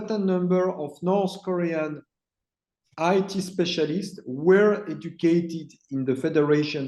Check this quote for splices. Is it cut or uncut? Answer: uncut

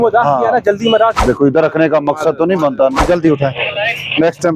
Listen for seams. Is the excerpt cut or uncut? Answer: cut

